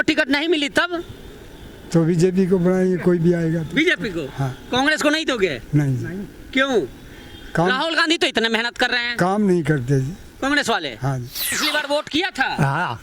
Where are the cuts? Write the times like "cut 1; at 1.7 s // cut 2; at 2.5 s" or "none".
cut 1; at 11.6 s